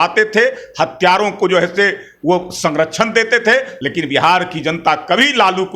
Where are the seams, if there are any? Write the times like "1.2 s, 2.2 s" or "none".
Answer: 3.7 s